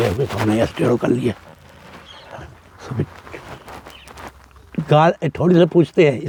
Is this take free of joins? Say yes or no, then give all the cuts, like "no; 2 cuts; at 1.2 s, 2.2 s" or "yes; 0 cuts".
yes; 0 cuts